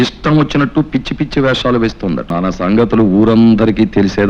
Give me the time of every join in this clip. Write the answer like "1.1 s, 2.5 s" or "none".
2.3 s

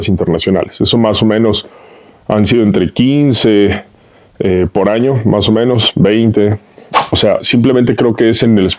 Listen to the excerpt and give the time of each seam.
6.9 s

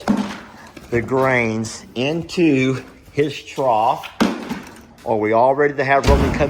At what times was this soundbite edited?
none

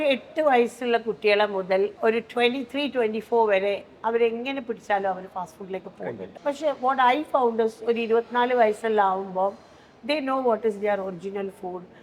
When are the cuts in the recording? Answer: 1.9 s, 6.2 s

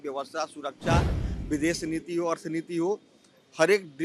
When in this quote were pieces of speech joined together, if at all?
none

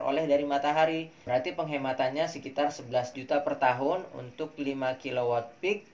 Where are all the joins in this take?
1.2 s, 3.2 s

